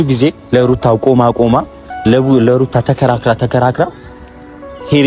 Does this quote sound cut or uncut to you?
uncut